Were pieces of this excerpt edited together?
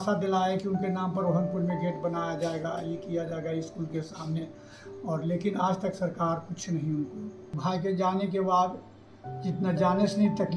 yes; 1 cut; at 7.5 s

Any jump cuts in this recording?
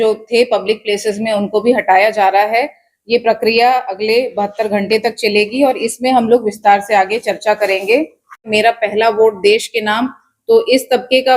yes; 1 cut; at 8.4 s

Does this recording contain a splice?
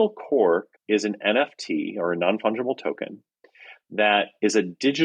no; 0 cuts

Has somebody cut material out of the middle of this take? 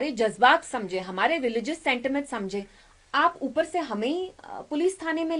no; 0 cuts

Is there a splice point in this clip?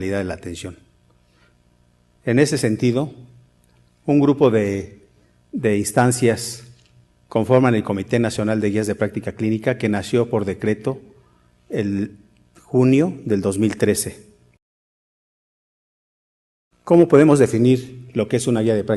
no; 0 cuts

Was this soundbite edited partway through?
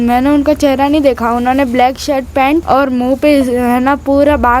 yes; 1 cut; at 2.6 s

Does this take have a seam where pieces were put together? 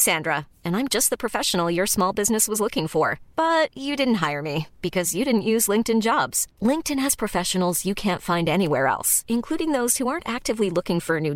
no; 0 cuts

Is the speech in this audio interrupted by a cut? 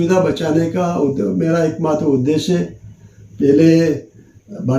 no; 0 cuts

